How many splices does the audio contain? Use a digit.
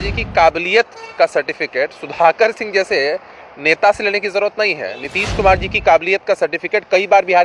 0